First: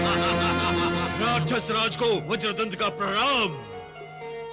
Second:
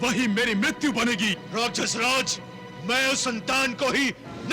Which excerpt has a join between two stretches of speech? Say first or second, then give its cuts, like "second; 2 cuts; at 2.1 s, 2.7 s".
first; 1 cut; at 1.1 s